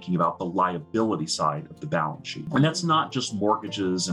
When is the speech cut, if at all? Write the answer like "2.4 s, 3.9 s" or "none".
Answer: 2.4 s